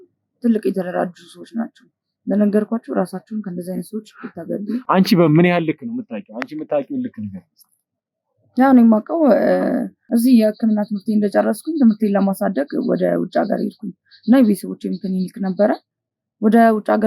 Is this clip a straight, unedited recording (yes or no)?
yes